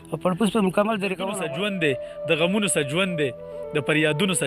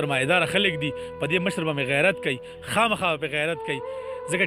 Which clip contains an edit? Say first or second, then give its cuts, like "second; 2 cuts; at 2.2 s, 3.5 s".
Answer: first; 1 cut; at 1.2 s